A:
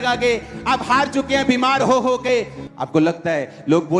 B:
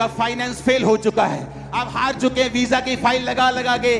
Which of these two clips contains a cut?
A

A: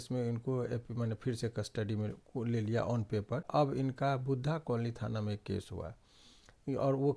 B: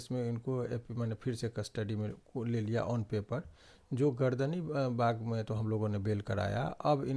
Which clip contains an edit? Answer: A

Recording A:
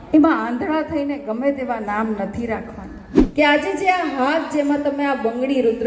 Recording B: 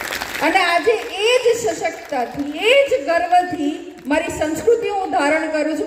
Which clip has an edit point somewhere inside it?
A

